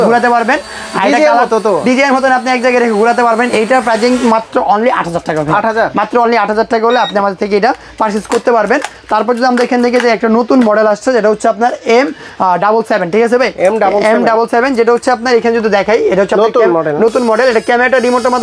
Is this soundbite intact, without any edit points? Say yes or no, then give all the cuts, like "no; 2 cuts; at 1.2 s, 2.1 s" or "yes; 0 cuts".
yes; 0 cuts